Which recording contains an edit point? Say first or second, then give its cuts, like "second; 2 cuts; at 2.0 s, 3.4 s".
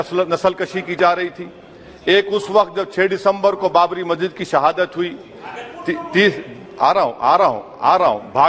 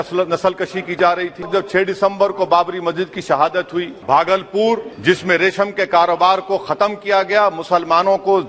second; 3 cuts; at 1.5 s, 4.0 s, 4.9 s